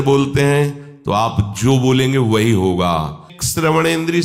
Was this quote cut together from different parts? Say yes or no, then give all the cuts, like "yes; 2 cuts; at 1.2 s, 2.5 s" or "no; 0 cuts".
yes; 1 cut; at 3.3 s